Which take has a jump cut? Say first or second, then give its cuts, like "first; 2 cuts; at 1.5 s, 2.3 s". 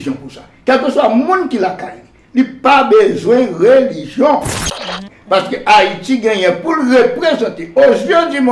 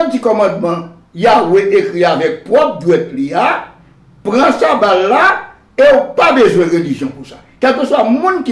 first; 1 cut; at 4.9 s